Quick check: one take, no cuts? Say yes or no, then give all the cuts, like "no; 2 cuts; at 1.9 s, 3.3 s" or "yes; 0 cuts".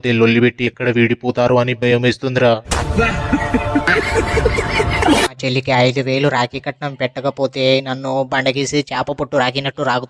no; 2 cuts; at 2.7 s, 5.4 s